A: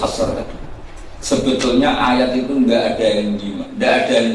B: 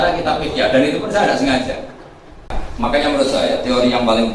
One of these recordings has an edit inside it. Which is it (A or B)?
B